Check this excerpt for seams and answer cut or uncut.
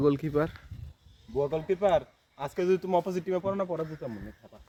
uncut